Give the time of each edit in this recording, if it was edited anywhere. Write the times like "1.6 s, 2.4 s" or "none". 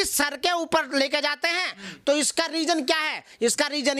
none